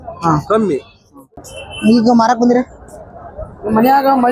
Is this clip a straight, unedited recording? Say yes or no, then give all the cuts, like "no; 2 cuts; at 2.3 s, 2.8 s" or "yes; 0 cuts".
no; 1 cut; at 1.2 s